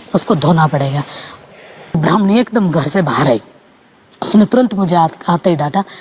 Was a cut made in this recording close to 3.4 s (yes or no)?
no